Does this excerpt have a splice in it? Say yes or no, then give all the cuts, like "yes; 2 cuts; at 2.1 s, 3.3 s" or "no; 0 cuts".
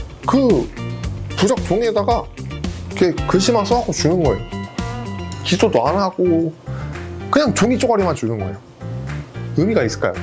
no; 0 cuts